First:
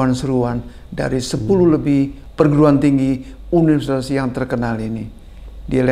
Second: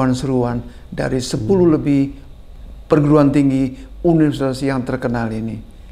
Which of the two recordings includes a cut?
first; 1 cut; at 2.2 s

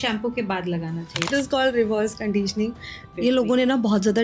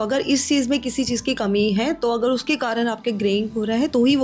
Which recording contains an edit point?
first; 2 cuts; at 1.3 s, 3.0 s

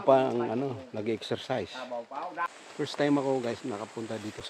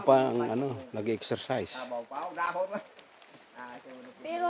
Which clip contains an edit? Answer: first; 1 cut; at 2.5 s

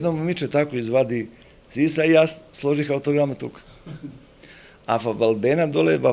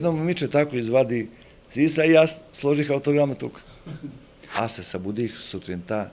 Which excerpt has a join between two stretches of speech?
second; 1 cut; at 4.5 s

